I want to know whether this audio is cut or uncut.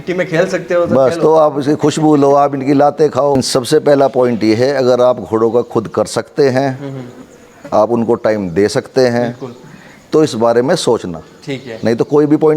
cut